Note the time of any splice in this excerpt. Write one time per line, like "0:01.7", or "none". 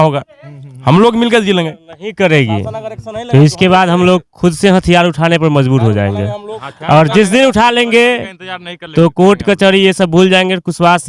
none